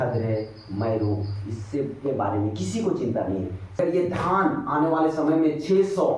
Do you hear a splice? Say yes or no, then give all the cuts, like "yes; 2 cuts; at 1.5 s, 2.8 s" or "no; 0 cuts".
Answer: yes; 1 cut; at 3.8 s